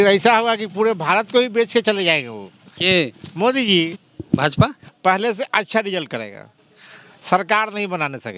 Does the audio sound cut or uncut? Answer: cut